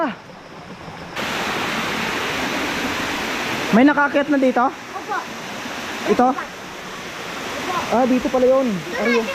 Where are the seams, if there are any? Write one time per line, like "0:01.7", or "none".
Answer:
0:01.2